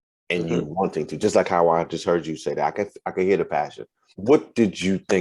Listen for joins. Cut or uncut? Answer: cut